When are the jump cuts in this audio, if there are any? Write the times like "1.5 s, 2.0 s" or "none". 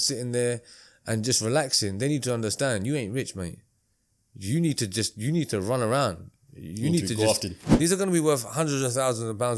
7.6 s